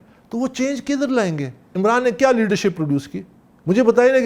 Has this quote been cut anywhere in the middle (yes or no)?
yes